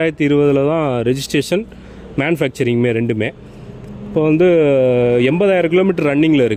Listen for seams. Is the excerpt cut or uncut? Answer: uncut